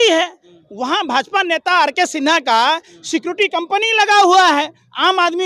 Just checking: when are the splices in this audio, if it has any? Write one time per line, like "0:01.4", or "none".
none